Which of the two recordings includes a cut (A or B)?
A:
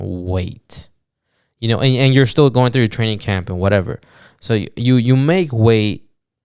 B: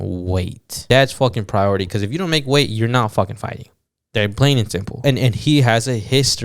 B